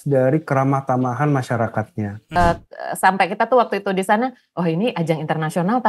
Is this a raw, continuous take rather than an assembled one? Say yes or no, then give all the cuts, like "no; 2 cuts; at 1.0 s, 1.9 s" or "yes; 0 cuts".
no; 1 cut; at 2.2 s